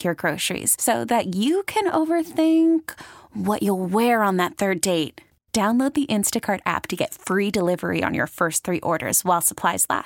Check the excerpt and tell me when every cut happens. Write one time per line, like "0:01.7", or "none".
none